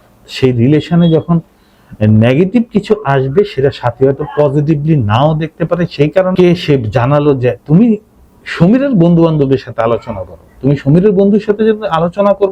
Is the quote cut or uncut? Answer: cut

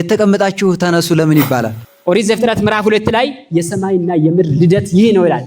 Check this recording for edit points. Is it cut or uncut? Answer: cut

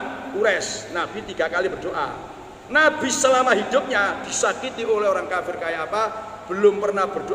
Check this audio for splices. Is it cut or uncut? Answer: uncut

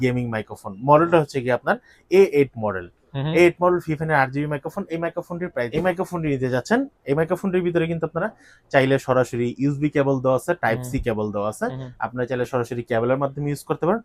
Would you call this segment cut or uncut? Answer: cut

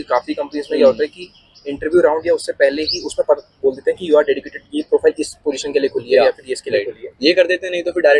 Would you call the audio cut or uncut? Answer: uncut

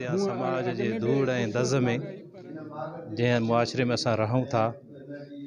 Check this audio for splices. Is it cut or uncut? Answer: uncut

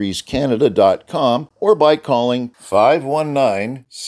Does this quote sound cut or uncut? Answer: cut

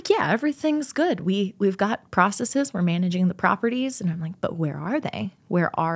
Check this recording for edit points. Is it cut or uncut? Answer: uncut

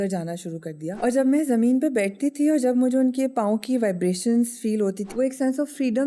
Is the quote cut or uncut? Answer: cut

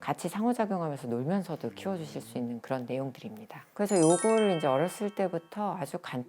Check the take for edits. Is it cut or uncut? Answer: cut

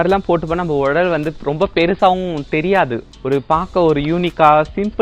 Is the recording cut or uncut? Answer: cut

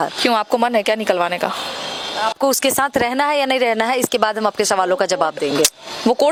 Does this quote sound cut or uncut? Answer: uncut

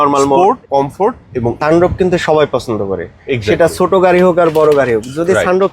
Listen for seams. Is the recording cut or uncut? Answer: cut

